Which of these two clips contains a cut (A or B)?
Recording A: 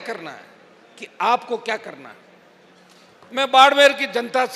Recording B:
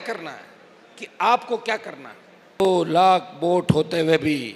B